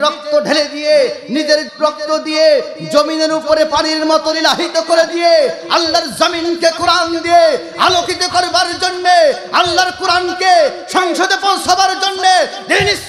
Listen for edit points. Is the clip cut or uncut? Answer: cut